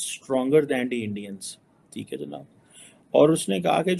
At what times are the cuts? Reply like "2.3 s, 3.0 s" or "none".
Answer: none